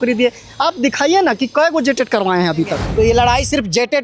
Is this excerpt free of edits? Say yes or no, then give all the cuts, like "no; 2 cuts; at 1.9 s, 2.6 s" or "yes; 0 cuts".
no; 1 cut; at 2.8 s